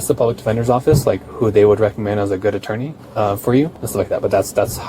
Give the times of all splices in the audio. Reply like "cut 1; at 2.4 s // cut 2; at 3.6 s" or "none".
cut 1; at 3.0 s // cut 2; at 3.8 s